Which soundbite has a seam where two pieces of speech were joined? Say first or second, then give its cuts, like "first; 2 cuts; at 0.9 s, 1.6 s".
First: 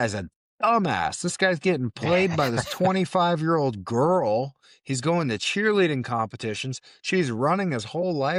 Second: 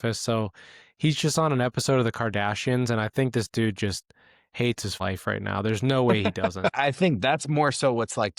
second; 2 cuts; at 5.0 s, 6.6 s